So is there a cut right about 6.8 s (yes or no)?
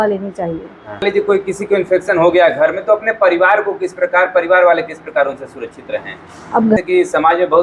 yes